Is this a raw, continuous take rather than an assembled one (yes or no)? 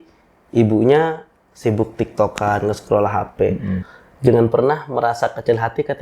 no